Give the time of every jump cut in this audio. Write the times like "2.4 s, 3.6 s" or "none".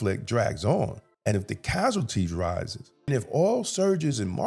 1.1 s, 3.1 s